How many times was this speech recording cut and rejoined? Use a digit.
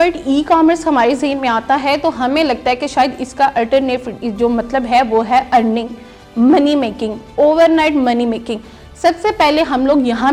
0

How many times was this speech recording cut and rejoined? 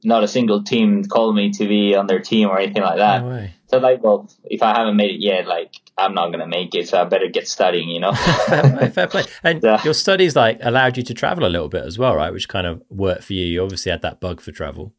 0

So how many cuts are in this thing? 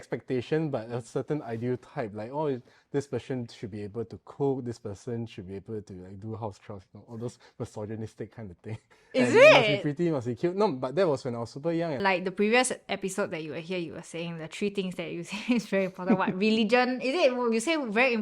1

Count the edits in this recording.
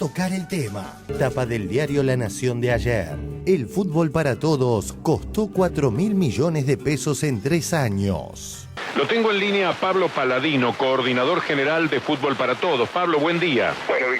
2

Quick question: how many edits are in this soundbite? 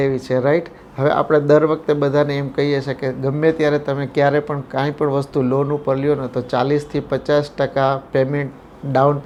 0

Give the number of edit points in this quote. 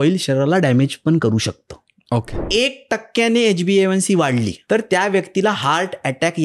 2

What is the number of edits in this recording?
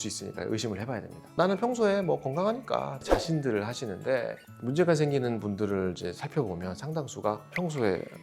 2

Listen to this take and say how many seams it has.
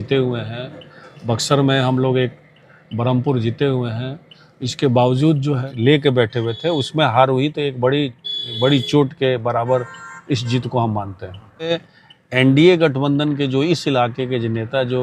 2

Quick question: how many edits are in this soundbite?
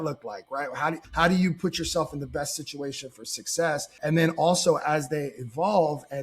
2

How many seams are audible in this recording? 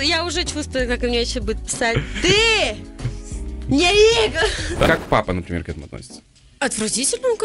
1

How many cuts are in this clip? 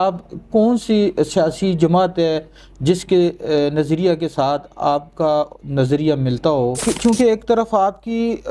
1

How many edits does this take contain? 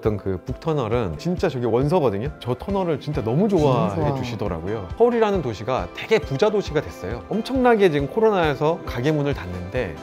2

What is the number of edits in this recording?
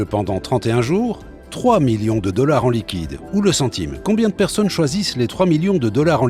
1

